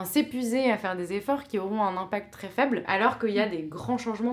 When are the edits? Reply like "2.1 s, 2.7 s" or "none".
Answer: 2.9 s